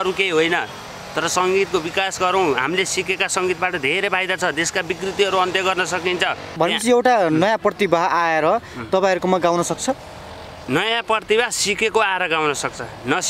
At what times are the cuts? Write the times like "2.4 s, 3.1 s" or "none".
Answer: 6.5 s